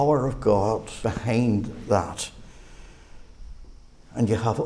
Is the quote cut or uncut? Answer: cut